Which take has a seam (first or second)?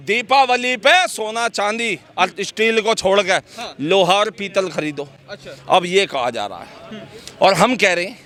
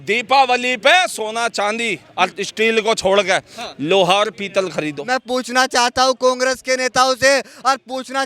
second